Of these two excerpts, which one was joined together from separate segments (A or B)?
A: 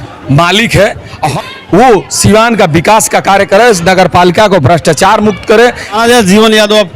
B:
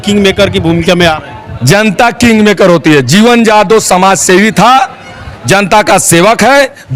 A